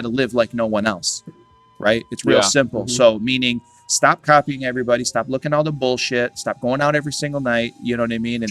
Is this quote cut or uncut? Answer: uncut